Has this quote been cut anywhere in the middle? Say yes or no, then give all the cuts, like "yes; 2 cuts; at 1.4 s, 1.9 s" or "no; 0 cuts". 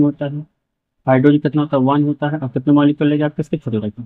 no; 0 cuts